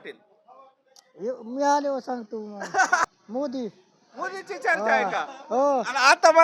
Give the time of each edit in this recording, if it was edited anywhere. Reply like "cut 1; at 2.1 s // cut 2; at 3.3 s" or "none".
cut 1; at 3.1 s